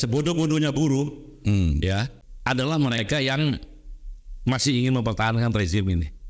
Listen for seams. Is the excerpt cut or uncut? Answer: uncut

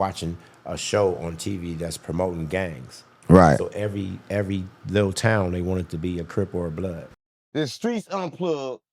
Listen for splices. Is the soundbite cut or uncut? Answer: cut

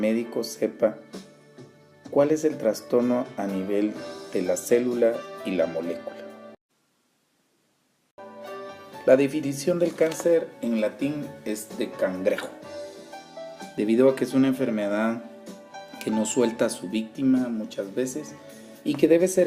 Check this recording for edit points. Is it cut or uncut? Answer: cut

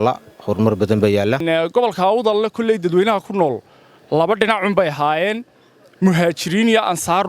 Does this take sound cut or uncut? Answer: cut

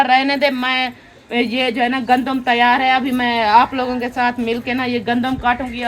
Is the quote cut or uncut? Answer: uncut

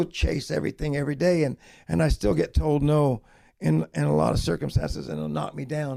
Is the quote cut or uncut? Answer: uncut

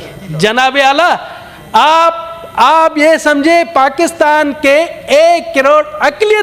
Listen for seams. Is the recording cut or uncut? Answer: uncut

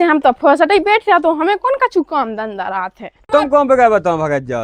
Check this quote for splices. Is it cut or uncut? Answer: cut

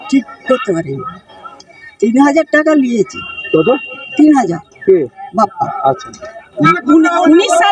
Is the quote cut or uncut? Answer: cut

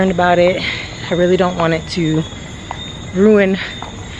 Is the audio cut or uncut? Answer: uncut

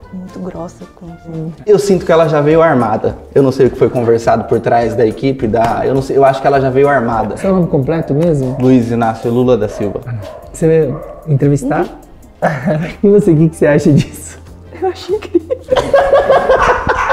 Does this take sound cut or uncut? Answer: cut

